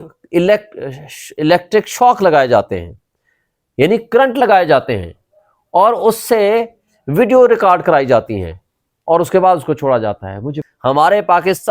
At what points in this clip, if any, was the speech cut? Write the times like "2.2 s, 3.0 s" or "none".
10.6 s